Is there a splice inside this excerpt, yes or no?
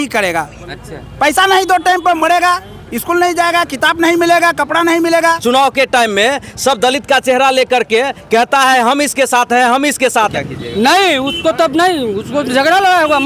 yes